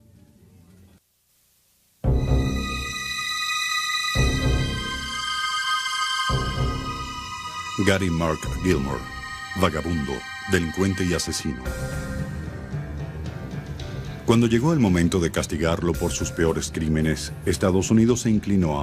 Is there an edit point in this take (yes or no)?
no